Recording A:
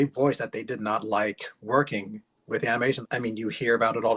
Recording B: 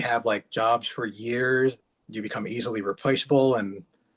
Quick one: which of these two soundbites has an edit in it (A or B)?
A